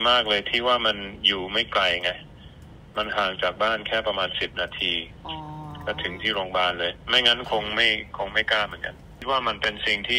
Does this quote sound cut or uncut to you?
cut